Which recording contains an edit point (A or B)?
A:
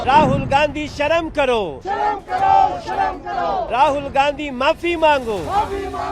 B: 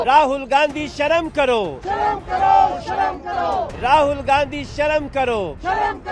A